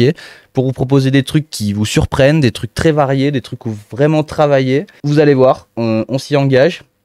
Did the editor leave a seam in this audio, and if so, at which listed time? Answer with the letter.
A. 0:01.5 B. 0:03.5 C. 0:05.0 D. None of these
C